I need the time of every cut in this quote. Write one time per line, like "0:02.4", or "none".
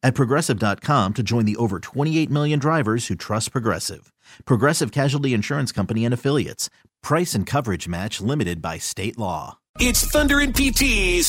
0:09.7

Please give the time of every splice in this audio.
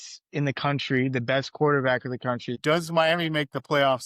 0:02.6

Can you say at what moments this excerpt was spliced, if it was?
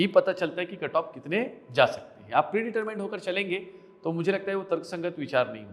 none

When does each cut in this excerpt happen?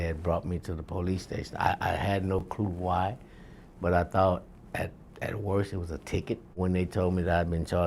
0:06.6

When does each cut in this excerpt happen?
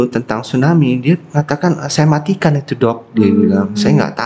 none

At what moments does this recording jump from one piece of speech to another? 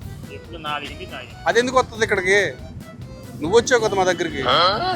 0:02.8

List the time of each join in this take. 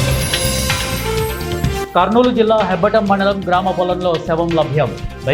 0:01.8

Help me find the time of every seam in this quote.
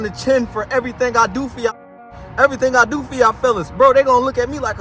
0:01.8

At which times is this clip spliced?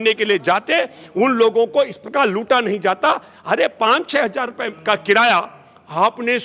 none

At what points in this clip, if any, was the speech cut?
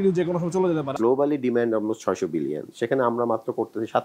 0:00.9

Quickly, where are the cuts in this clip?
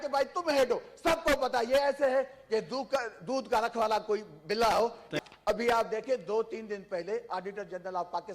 0:05.2

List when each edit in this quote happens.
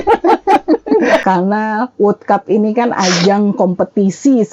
0:01.2

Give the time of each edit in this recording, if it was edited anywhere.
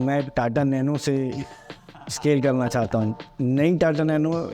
0:03.2

